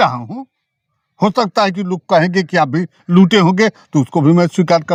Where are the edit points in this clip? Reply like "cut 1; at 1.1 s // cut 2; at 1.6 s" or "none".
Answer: none